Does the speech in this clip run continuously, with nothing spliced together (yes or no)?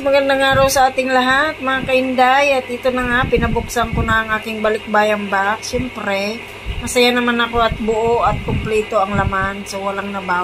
yes